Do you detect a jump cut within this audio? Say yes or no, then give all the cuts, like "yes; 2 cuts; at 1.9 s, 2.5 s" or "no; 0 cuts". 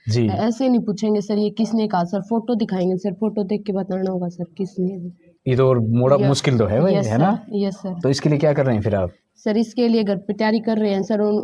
no; 0 cuts